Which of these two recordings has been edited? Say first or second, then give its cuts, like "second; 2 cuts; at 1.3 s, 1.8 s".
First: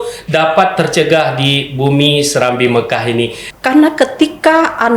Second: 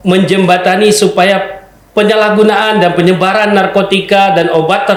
first; 1 cut; at 3.4 s